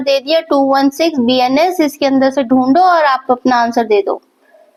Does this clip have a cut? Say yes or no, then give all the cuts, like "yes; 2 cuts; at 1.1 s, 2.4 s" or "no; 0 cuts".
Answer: no; 0 cuts